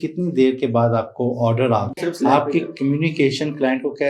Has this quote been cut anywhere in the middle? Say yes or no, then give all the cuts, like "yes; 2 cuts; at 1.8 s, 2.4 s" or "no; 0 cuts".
yes; 1 cut; at 2.0 s